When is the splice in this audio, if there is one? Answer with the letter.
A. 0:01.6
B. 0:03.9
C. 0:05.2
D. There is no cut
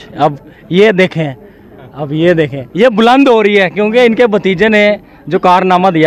D